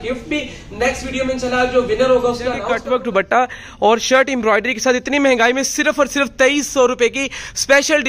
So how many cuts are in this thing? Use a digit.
1